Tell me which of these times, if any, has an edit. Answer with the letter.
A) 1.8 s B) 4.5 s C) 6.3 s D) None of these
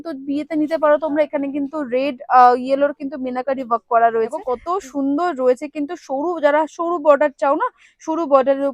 B